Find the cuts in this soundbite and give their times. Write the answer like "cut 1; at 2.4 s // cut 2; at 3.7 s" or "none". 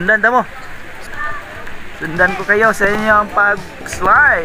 cut 1; at 1.0 s